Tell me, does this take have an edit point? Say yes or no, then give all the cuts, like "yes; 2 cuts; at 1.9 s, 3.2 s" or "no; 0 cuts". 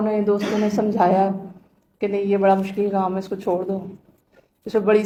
no; 0 cuts